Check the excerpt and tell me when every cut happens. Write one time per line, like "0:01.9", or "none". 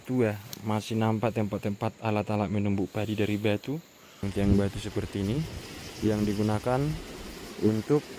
0:04.3